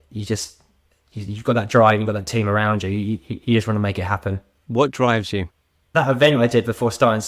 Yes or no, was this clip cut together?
yes